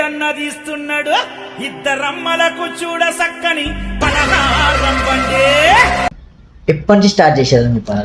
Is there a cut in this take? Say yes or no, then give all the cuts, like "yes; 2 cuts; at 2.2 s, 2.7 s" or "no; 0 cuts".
no; 0 cuts